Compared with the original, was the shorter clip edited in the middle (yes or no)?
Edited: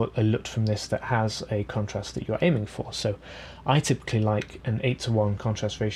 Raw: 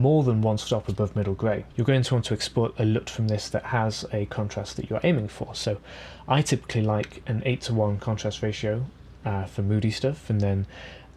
no